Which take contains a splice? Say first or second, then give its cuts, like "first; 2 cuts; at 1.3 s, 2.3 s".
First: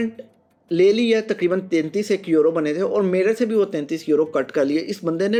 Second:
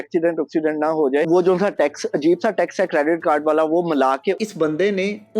second; 2 cuts; at 1.3 s, 4.4 s